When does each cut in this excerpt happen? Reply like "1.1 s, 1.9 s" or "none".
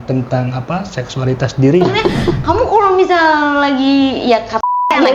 1.8 s